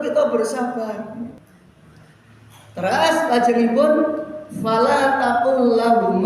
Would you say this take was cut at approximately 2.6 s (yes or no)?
no